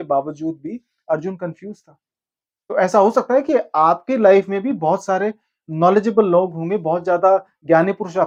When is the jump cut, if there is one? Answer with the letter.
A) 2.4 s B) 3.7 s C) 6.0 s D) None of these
D